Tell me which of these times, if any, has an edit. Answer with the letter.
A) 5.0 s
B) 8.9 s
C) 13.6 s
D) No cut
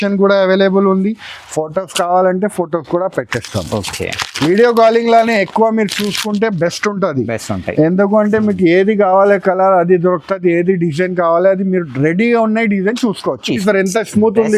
C